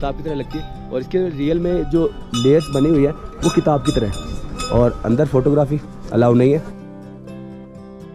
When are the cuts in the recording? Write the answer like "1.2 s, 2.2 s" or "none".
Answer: none